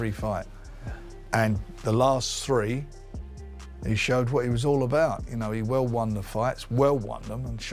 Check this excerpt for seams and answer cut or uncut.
uncut